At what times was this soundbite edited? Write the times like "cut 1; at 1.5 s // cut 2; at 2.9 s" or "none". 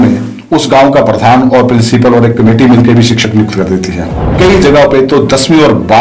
cut 1; at 4.3 s